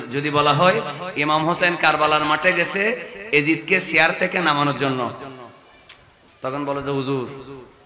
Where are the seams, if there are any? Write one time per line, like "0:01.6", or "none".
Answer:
none